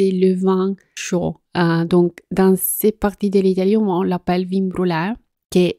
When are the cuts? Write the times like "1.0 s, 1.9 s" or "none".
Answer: 0.9 s